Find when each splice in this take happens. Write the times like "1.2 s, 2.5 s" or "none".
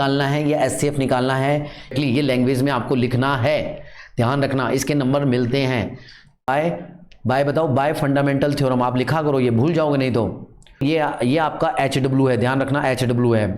1.9 s, 6.5 s, 10.8 s